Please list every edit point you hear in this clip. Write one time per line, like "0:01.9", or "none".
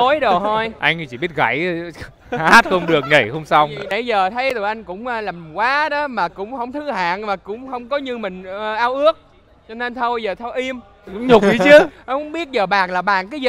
none